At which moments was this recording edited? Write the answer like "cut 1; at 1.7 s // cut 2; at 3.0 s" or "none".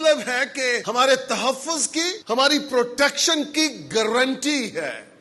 cut 1; at 0.8 s // cut 2; at 2.2 s